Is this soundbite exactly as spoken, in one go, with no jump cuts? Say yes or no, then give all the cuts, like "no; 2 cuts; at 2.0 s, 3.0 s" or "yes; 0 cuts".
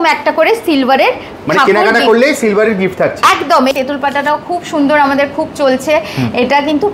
no; 1 cut; at 3.7 s